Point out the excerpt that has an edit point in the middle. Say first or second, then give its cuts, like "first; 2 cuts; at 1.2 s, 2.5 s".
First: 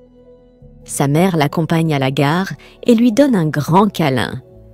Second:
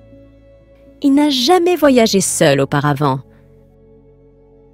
second; 1 cut; at 1.0 s